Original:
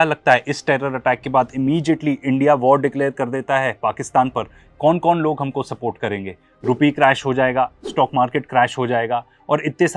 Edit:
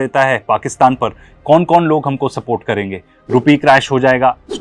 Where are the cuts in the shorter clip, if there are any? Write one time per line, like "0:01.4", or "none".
none

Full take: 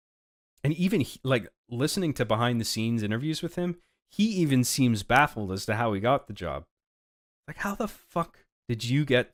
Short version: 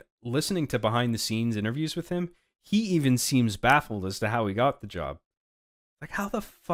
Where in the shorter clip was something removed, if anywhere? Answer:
none

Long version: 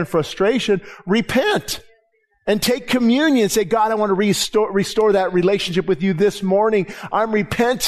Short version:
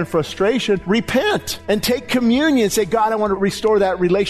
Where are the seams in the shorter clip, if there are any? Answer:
0:00.8
0:01.5
0:03.4

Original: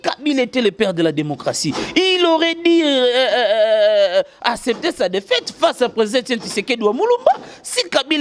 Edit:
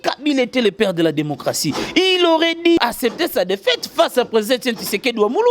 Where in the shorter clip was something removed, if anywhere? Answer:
0:02.8

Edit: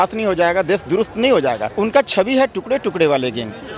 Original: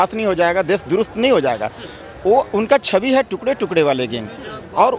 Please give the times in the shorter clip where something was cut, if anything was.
0:01.7

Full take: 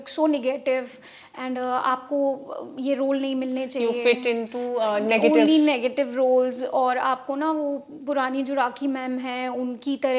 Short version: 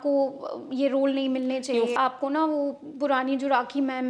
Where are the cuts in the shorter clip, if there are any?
0:02.0

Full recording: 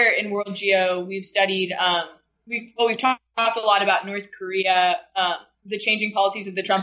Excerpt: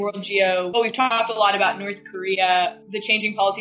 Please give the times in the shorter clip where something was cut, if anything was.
0:00.9
0:02.8

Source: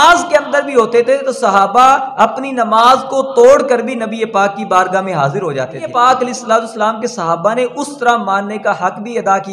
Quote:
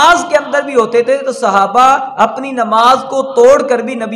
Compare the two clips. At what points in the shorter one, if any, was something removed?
none

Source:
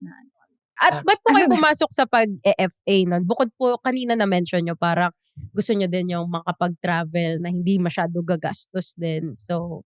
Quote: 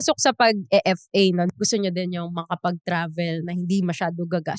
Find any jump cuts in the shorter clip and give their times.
0:01.5

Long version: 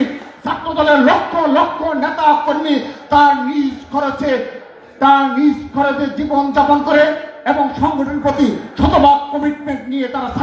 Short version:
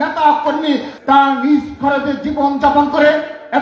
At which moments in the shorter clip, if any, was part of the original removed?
0:00.9

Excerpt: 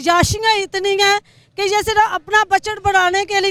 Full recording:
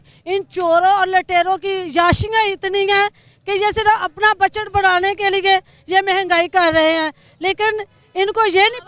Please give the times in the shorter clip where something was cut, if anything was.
none

